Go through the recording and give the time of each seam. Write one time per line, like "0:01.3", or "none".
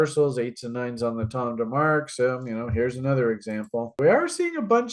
0:04.0